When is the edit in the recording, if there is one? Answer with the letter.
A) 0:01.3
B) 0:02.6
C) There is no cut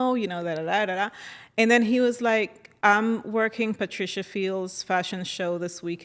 B